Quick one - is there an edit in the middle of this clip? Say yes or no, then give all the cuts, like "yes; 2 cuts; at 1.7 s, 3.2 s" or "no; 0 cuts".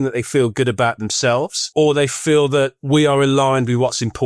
yes; 2 cuts; at 1.6 s, 2.8 s